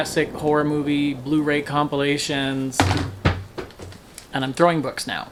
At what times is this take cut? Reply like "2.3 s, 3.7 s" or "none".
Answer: none